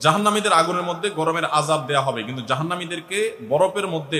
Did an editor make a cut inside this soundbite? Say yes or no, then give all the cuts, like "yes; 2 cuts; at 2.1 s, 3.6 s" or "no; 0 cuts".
no; 0 cuts